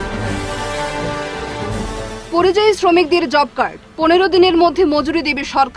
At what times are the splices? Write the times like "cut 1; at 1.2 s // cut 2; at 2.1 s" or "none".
cut 1; at 1.9 s